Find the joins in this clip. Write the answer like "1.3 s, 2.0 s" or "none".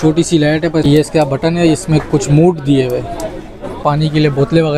0.8 s, 3.8 s